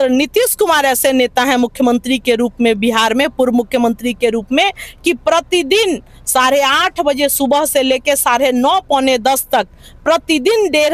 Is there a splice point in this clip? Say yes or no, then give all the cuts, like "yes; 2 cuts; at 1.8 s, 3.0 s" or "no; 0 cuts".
no; 0 cuts